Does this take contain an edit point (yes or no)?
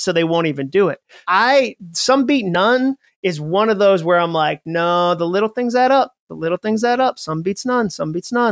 yes